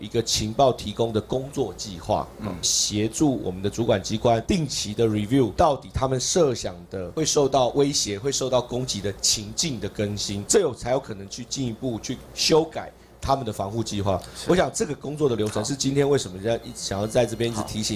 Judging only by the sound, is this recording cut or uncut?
uncut